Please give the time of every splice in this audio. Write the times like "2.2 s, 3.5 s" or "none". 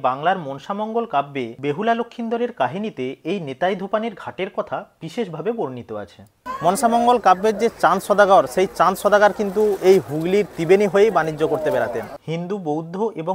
6.4 s, 12.2 s